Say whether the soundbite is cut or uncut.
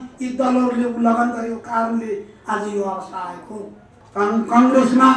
cut